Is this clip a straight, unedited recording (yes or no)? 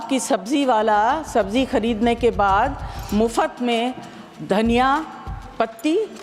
yes